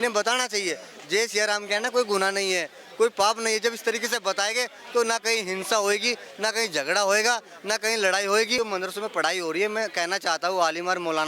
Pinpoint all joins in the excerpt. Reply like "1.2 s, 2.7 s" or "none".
8.6 s